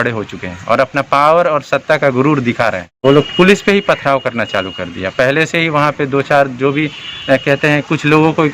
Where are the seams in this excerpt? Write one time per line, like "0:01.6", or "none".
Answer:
0:03.0